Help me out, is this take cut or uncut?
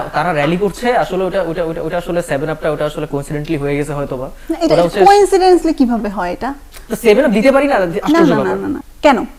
uncut